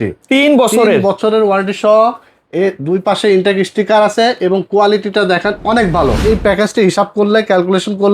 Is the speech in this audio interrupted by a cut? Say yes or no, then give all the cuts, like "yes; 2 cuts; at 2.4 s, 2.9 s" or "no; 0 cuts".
yes; 1 cut; at 6.2 s